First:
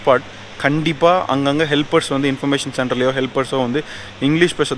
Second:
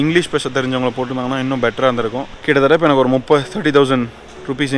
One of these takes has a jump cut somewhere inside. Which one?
second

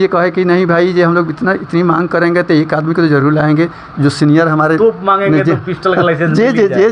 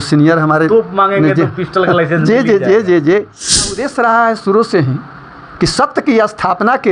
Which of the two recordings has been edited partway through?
second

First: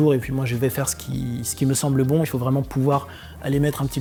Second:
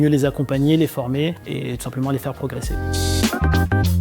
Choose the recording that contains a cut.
second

